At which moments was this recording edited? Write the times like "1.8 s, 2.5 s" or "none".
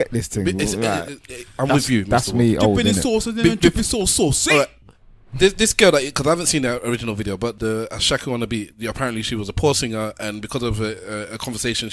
7.5 s